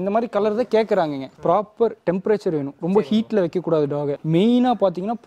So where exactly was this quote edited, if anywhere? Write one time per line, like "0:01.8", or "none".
0:01.3
0:04.2